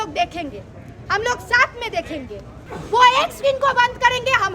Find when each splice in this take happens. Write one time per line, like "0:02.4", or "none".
0:02.7